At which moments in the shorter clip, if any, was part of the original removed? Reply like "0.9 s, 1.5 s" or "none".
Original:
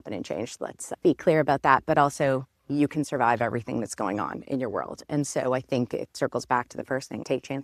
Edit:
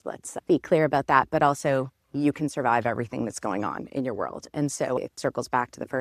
5.0 s